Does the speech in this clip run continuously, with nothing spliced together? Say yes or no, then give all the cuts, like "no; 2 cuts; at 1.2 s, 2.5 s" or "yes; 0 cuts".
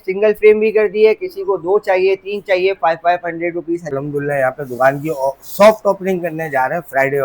no; 1 cut; at 3.9 s